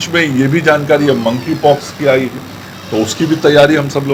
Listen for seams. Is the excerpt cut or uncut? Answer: uncut